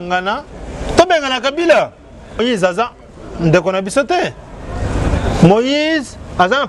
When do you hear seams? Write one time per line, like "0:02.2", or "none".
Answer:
0:02.4